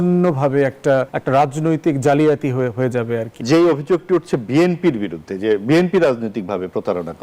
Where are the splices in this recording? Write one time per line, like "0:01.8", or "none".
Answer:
0:01.2
0:03.3